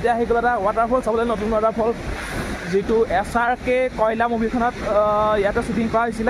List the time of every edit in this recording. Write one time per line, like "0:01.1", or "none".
none